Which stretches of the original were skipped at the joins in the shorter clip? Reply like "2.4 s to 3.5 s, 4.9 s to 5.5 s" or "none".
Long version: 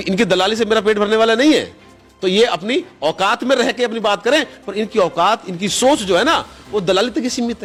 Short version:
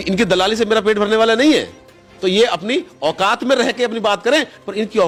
none